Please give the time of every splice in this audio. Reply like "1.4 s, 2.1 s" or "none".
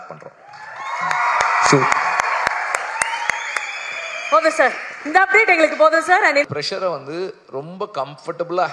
6.5 s